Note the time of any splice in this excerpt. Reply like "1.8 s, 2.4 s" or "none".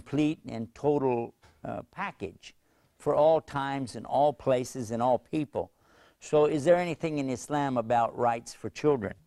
2.9 s